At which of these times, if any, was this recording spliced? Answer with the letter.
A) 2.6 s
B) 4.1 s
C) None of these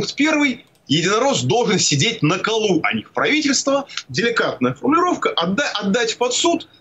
B